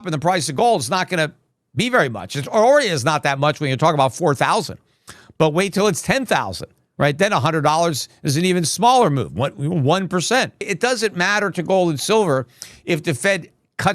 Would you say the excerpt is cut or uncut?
cut